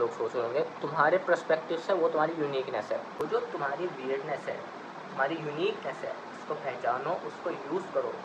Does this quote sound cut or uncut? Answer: cut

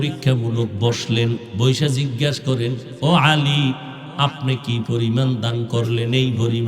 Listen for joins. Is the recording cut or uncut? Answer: cut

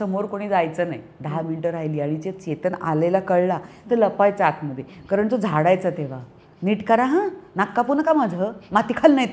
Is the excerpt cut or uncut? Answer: uncut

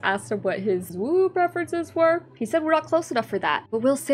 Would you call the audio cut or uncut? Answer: cut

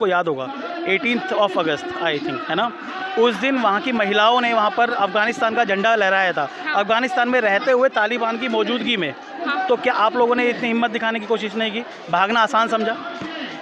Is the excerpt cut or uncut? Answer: uncut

